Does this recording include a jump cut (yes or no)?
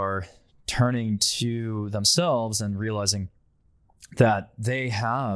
no